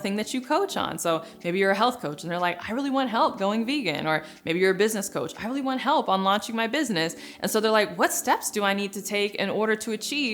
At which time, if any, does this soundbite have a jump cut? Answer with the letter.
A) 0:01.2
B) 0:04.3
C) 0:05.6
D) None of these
D